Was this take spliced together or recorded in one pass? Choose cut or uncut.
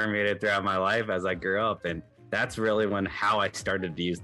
uncut